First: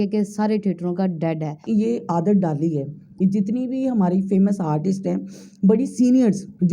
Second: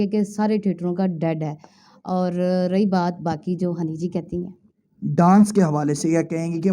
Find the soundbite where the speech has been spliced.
first; 1 cut; at 1.6 s

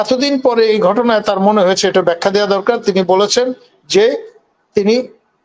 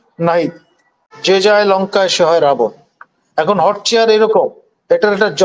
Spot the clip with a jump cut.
second; 1 cut; at 1.0 s

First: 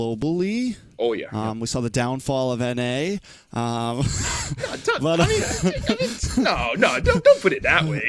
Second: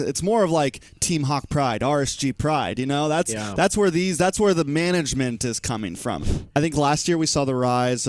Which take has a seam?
second; 1 cut; at 6.2 s

